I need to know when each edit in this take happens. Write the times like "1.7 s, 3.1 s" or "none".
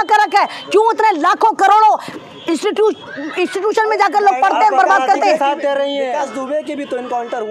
none